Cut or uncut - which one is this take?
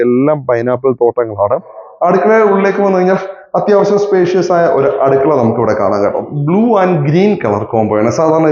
cut